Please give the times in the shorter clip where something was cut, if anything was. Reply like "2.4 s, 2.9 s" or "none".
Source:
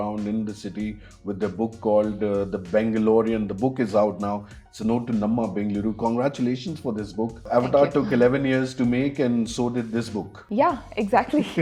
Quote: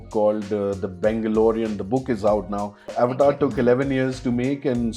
2.8 s